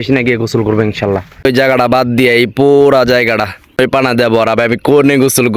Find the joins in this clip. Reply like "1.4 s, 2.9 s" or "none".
1.5 s, 3.8 s